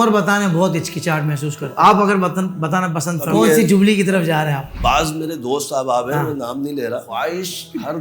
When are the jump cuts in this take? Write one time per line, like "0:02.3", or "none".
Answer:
0:01.6
0:03.3
0:04.7
0:07.1